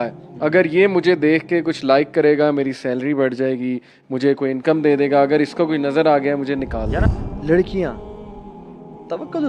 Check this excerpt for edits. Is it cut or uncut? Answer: cut